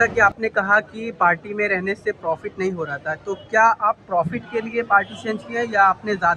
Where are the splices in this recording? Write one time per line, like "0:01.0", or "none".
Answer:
none